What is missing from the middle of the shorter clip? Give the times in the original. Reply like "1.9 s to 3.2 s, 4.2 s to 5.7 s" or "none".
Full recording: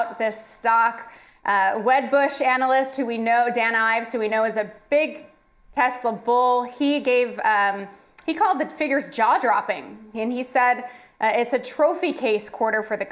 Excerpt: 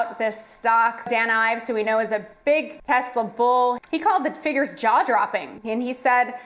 1.1 s to 3.5 s, 5.2 s to 5.6 s, 6.7 s to 8.2 s, 9.9 s to 10.0 s